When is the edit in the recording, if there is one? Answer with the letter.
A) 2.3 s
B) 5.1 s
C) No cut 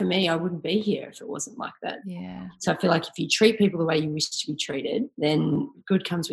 B